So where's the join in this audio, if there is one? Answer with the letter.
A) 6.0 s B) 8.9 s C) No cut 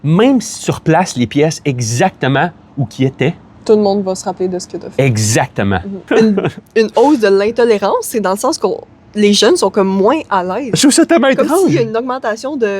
A